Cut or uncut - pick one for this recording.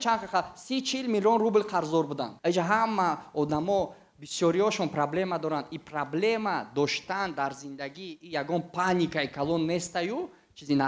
cut